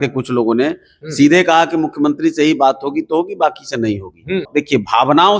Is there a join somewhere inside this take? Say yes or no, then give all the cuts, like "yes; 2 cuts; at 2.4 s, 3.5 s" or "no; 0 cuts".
yes; 1 cut; at 4.5 s